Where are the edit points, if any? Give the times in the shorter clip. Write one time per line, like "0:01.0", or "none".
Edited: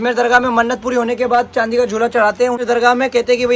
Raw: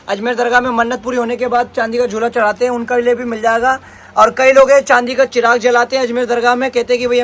0:02.6